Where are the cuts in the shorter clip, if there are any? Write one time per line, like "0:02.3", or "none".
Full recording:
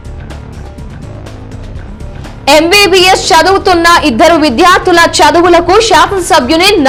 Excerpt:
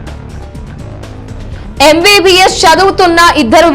0:01.8